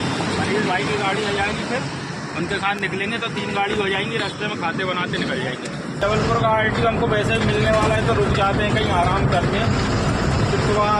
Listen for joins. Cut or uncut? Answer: cut